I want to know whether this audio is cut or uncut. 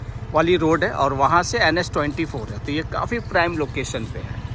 uncut